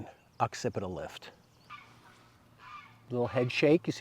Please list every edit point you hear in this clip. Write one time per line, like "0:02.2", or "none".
0:01.7
0:03.0